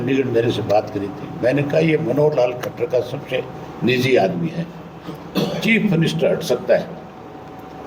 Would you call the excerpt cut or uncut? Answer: uncut